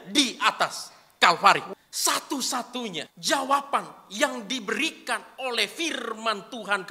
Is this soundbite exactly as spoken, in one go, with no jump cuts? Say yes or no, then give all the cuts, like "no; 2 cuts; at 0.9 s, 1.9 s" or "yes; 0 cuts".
no; 2 cuts; at 1.7 s, 3.1 s